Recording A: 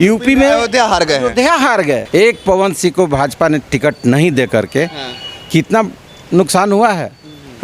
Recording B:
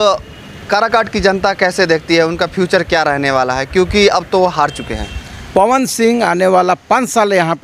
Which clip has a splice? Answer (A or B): A